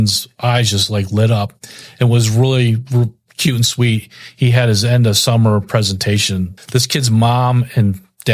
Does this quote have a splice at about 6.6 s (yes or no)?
yes